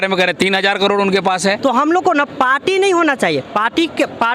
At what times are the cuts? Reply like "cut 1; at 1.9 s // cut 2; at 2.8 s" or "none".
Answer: cut 1; at 1.6 s

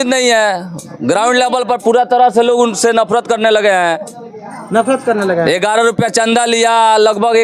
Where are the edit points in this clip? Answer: none

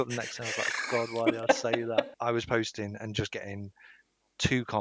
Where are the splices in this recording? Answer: cut 1; at 2.1 s

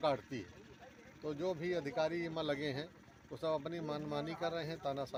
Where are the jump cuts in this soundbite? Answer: none

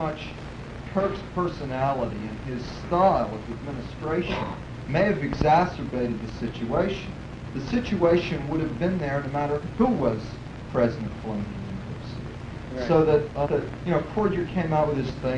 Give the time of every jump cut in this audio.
cut 1; at 14.5 s

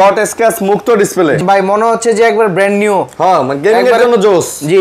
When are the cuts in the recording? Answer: cut 1; at 1.4 s

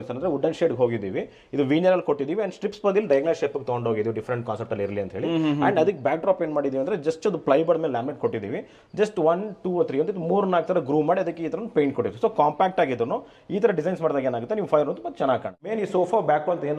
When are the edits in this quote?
cut 1; at 15.6 s

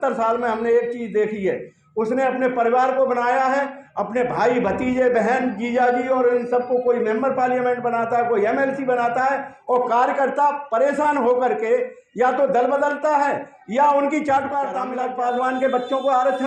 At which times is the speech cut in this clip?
cut 1; at 14.8 s

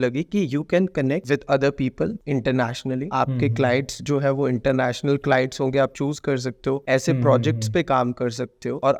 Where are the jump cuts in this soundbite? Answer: none

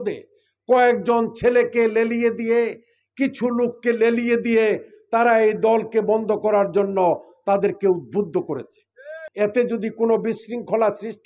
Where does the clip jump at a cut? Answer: cut 1; at 9.2 s

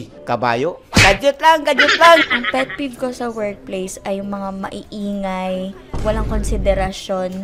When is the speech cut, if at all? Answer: none

